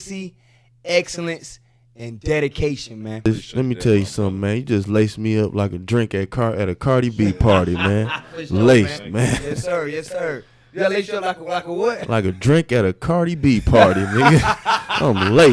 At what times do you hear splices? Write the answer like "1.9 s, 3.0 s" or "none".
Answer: 3.3 s